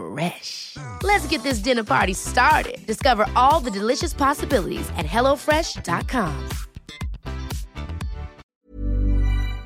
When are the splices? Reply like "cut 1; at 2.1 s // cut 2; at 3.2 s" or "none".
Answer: cut 1; at 8.4 s